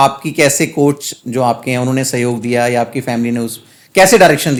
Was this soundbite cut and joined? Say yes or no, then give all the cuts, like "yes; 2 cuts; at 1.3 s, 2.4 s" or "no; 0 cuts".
no; 0 cuts